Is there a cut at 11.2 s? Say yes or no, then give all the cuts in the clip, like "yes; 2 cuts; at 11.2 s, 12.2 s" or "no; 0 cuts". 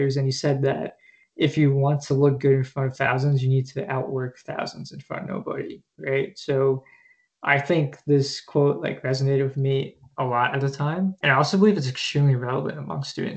yes; 1 cut; at 11.2 s